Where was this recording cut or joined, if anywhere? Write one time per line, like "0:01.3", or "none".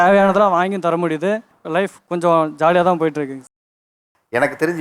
none